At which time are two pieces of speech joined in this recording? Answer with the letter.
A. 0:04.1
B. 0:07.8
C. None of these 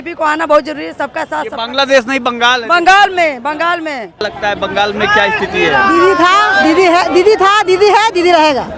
A